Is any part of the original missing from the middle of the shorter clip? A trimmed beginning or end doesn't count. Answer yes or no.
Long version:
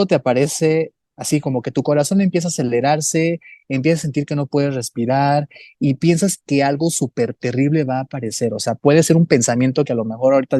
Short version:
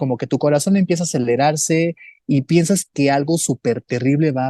yes